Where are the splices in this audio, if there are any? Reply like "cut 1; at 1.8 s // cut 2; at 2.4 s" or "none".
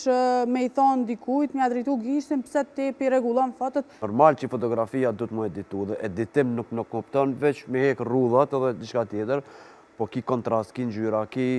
cut 1; at 4.0 s